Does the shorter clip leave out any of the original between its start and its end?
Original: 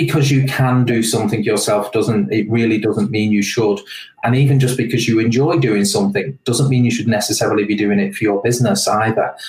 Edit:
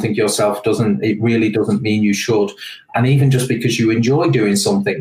no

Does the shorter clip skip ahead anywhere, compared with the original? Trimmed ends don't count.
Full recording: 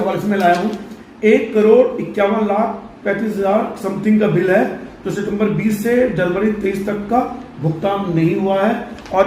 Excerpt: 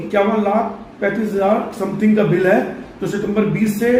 no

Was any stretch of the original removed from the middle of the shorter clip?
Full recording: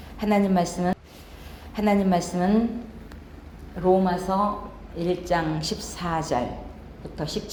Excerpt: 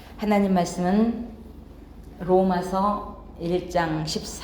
yes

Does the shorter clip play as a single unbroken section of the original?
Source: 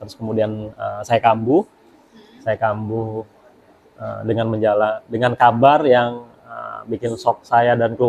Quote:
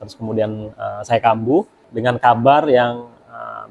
no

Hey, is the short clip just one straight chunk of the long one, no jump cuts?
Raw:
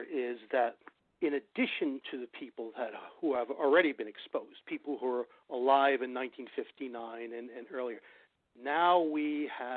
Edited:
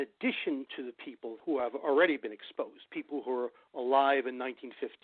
no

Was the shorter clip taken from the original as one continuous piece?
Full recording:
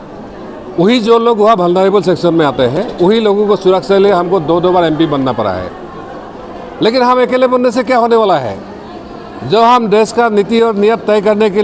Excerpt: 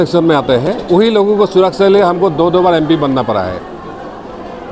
yes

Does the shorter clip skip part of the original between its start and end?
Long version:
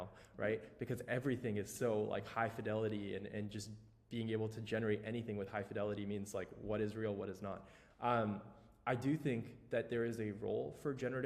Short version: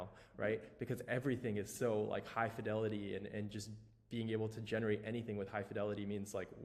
no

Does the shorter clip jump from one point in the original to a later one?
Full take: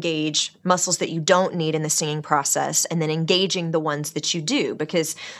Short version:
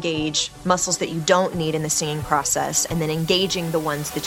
no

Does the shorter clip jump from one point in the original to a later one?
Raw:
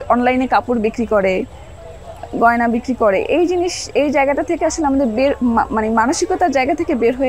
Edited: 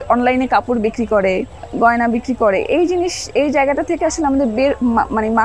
yes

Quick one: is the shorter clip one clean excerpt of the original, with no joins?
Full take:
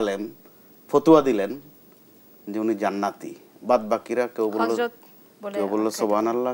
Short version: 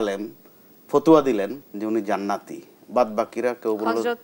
no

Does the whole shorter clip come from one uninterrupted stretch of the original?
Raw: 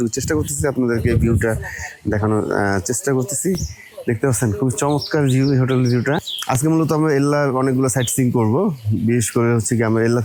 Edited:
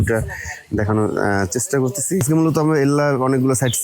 no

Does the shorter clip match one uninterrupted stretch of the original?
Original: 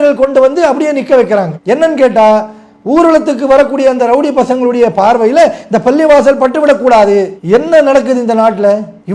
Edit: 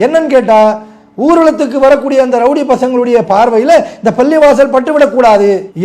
yes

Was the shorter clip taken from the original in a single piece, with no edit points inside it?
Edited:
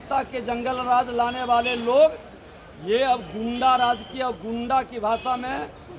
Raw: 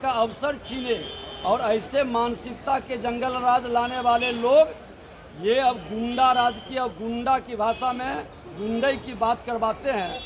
yes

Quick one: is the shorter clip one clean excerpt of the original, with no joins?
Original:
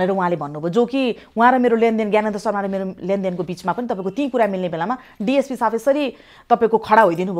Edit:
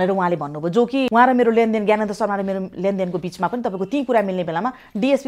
no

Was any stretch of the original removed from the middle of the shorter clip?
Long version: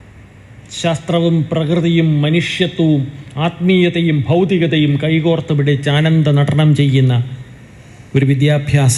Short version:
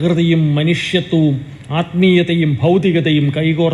no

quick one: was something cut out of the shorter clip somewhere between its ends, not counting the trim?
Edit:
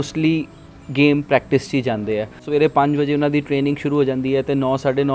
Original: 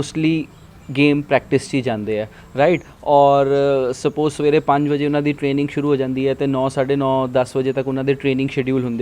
yes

